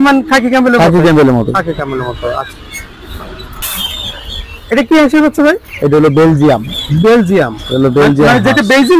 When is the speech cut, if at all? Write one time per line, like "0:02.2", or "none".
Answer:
none